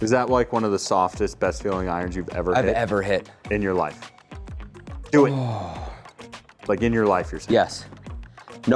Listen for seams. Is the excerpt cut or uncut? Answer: uncut